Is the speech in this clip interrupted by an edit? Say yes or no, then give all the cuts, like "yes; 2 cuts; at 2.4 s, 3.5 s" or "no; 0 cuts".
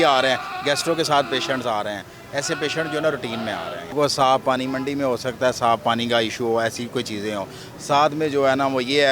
yes; 1 cut; at 3.8 s